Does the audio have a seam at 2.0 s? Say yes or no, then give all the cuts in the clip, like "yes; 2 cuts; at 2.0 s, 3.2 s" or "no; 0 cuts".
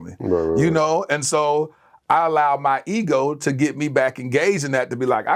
no; 0 cuts